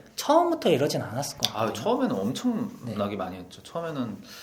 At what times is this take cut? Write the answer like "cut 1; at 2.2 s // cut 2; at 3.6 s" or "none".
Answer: none